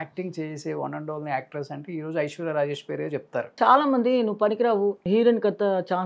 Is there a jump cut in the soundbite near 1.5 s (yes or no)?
no